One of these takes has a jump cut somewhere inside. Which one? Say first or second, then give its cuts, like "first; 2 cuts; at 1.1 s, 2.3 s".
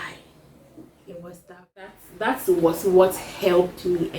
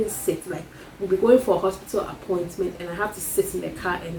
first; 1 cut; at 2.0 s